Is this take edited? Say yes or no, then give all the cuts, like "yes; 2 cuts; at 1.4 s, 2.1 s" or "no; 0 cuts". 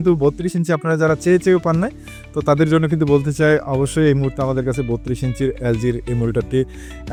no; 0 cuts